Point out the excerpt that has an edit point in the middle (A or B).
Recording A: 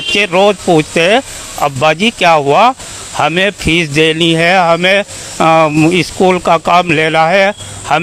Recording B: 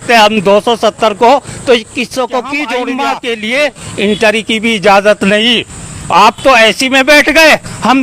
B